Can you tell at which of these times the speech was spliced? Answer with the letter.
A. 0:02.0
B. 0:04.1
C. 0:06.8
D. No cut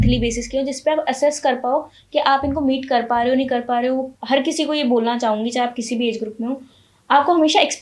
B